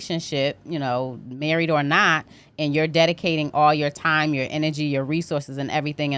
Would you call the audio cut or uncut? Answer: uncut